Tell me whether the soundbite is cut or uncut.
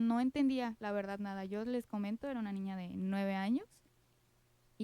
uncut